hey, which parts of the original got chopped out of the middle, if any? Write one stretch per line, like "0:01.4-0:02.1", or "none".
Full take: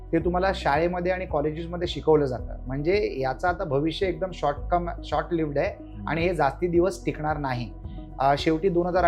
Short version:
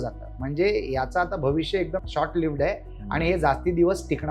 0:04.3-0:05.0

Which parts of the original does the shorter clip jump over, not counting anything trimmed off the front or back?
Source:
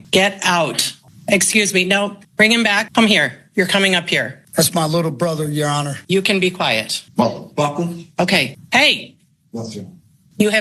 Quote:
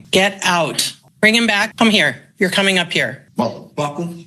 0:01.0-0:02.2
0:04.4-0:07.0

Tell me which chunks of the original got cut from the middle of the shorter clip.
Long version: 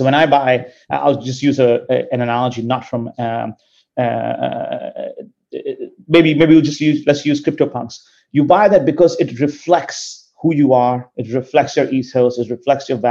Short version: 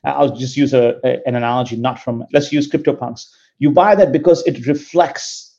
0:03.1-0:07.0

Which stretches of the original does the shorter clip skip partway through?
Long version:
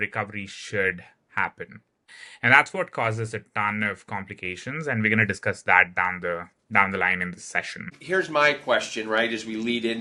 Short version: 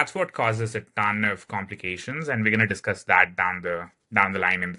none

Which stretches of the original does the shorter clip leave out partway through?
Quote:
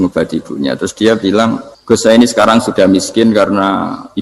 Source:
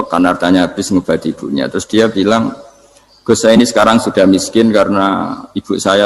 0:02.6-0:03.1

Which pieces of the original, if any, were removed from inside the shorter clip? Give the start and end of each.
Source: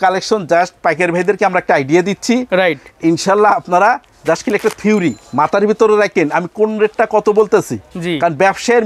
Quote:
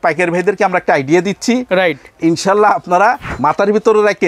0:04.1-0:05.2

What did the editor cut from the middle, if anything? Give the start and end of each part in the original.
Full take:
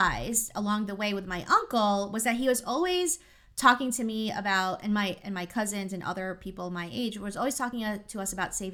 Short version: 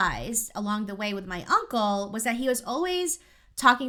none

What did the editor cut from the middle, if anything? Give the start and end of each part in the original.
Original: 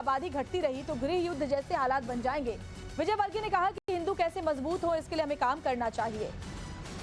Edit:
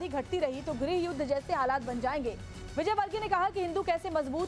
0:03.8-0:03.9

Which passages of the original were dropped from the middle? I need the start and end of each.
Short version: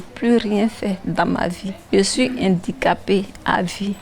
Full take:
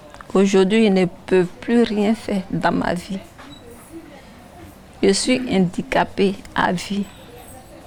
0:03.2-0:04.8

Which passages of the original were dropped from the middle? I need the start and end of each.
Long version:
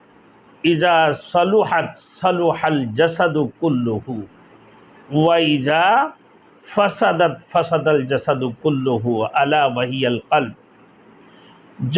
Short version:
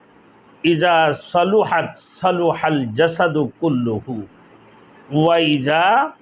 none

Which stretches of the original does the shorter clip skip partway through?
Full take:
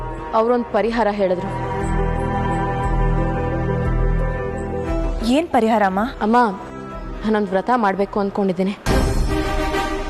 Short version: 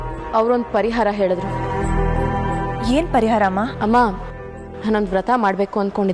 0:02.8-0:05.2

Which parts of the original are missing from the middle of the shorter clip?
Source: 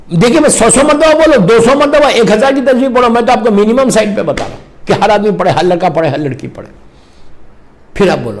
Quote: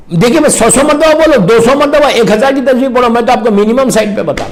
none

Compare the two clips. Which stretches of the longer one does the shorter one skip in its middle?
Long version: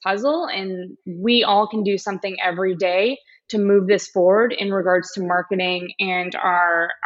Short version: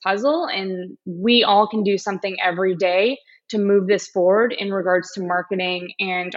none

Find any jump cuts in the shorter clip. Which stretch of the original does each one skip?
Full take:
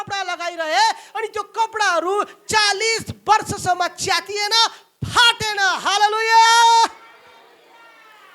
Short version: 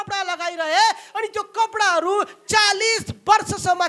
none

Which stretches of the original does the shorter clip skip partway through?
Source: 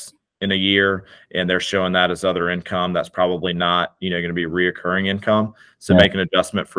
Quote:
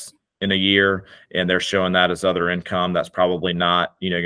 none

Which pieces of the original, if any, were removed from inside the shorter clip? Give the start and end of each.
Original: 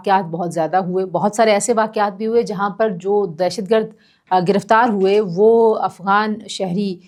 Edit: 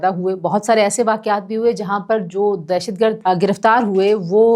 0:03.9-0:04.2

